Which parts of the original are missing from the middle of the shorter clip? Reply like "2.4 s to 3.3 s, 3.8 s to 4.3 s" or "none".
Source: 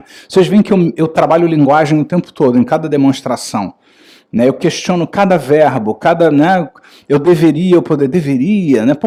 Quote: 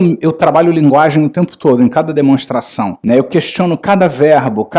3.7 s to 4.2 s